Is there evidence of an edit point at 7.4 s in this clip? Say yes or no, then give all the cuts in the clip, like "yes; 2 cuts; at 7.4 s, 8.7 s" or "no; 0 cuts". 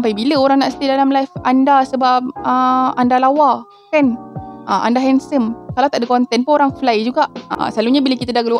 yes; 1 cut; at 7.4 s